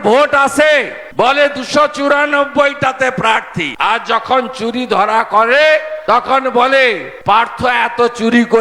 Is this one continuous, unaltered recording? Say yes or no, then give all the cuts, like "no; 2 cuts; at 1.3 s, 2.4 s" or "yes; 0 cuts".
yes; 0 cuts